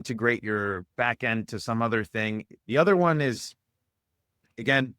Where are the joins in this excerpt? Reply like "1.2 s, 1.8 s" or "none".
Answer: 2.5 s

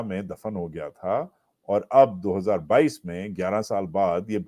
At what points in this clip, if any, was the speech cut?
none

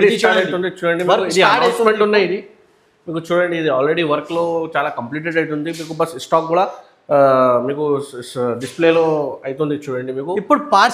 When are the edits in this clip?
none

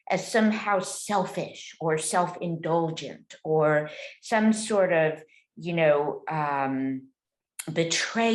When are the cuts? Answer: none

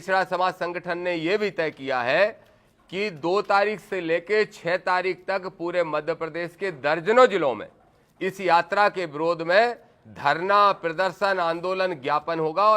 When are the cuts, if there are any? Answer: none

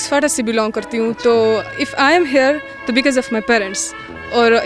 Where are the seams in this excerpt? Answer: none

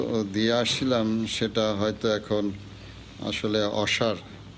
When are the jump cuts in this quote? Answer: none

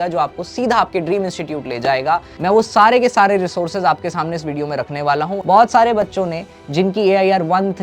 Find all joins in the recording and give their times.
5.4 s

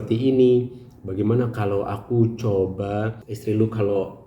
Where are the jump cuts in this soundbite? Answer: 3.2 s

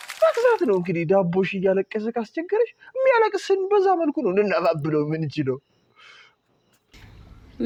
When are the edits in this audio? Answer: none

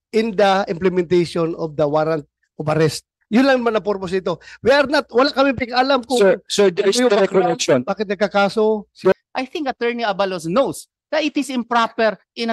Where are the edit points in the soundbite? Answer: 9.1 s

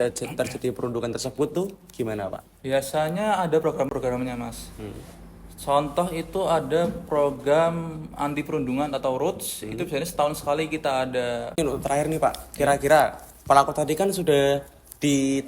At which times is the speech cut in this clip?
11.6 s

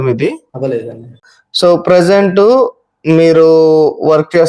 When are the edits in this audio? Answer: 1.2 s

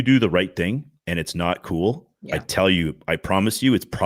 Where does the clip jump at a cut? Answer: 0.9 s, 2.1 s

